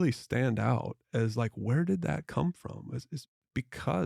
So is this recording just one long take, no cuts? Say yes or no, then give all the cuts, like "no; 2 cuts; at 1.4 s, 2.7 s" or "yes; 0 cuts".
yes; 0 cuts